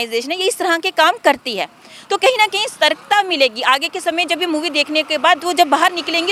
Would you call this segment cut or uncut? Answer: uncut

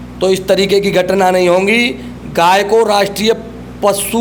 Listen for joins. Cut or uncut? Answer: uncut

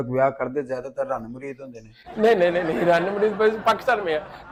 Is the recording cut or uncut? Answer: uncut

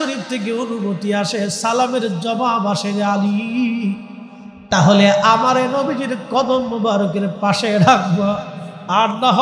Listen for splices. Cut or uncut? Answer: uncut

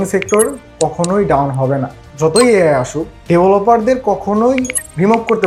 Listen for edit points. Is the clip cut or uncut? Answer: uncut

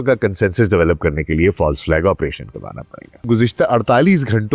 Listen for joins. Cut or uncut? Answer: cut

